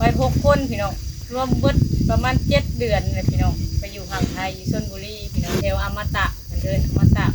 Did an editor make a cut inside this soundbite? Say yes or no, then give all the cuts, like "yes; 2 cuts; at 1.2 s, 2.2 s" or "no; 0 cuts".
yes; 2 cuts; at 1.3 s, 5.6 s